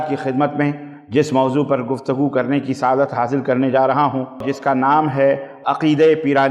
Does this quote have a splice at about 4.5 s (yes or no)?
yes